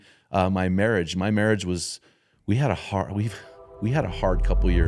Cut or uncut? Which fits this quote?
uncut